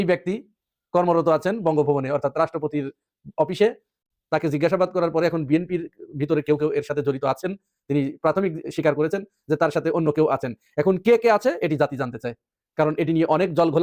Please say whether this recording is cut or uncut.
cut